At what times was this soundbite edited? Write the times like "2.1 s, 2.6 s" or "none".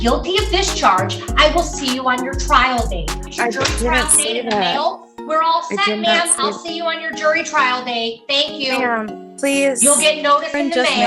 3.2 s

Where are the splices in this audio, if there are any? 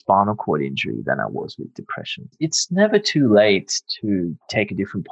2.3 s

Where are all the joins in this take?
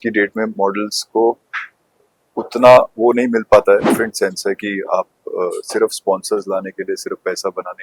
3.9 s

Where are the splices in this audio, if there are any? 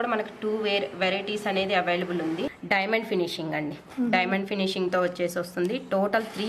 2.6 s

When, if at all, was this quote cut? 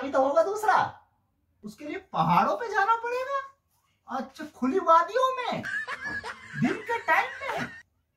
1.1 s

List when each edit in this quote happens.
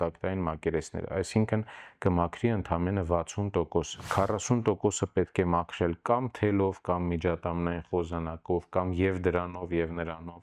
4.0 s

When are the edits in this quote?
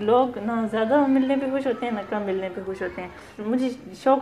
3.3 s

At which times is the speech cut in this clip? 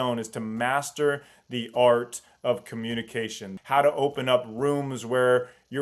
3.5 s

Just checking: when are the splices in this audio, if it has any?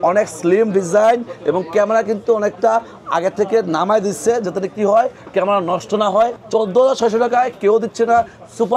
6.4 s

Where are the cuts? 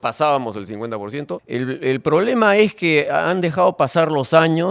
1.4 s

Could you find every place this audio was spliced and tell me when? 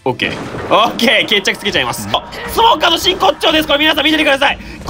2.1 s

